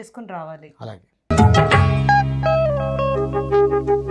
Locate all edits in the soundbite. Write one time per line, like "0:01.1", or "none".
0:01.1